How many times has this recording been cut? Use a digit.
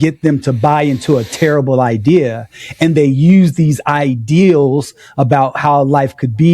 0